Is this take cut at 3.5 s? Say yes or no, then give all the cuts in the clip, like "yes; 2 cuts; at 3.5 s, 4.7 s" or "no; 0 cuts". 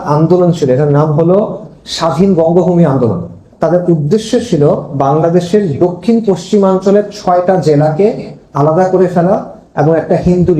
yes; 1 cut; at 3.5 s